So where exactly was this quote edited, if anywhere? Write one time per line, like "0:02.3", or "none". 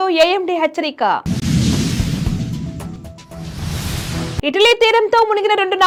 none